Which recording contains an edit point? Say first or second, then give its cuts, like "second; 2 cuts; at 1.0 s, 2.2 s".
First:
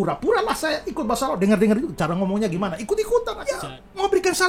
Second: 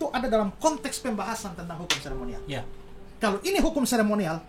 first; 1 cut; at 3.3 s